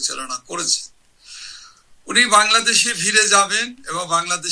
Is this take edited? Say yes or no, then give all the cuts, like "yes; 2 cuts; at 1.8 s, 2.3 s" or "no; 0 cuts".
no; 0 cuts